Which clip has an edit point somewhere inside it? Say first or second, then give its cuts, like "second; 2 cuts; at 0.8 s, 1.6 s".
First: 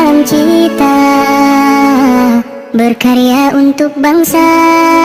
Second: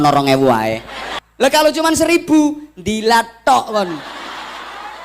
second; 1 cut; at 1.3 s